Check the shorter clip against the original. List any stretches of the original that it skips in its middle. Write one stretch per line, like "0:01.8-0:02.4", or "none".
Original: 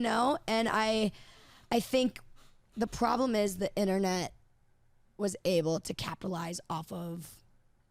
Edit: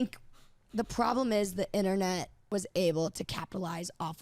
0:04.4-0:05.0